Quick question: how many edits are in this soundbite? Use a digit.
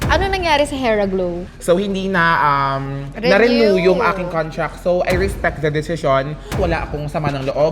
2